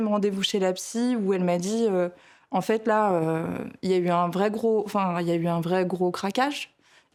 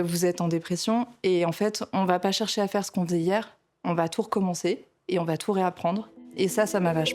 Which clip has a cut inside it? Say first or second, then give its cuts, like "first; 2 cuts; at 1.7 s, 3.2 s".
second; 1 cut; at 6.2 s